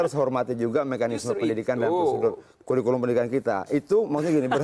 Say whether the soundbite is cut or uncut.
uncut